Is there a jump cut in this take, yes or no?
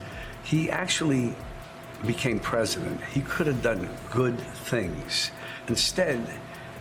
no